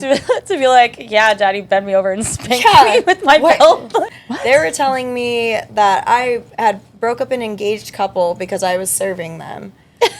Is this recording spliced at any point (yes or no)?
yes